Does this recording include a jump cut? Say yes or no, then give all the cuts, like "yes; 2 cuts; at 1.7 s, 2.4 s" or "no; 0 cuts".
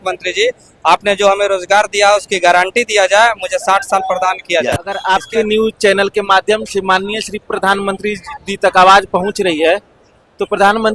yes; 1 cut; at 4.9 s